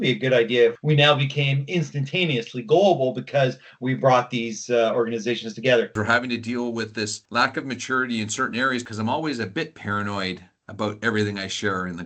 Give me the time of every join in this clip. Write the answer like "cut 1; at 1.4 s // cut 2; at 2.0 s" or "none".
cut 1; at 0.8 s // cut 2; at 5.9 s // cut 3; at 8.8 s